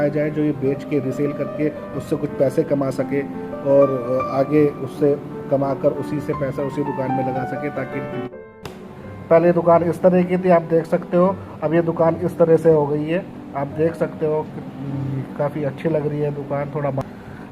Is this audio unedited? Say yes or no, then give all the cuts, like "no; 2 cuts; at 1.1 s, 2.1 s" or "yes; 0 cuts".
no; 1 cut; at 8.3 s